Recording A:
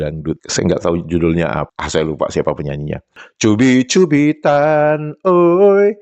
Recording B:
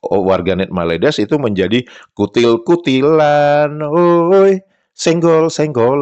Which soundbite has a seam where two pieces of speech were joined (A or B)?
A